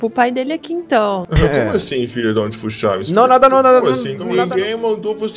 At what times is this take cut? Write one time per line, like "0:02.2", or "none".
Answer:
0:01.3
0:04.2